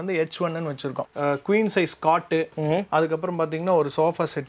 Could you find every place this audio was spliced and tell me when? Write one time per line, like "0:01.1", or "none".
0:01.0